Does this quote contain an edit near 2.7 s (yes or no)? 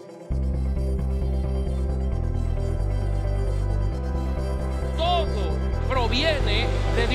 no